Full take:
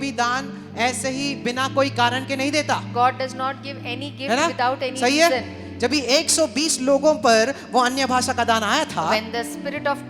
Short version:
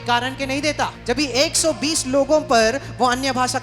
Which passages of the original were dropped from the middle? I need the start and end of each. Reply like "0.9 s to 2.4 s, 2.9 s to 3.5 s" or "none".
2.9 s to 5.7 s